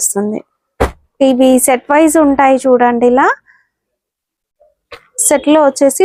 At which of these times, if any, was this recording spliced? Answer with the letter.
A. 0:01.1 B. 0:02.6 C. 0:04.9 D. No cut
D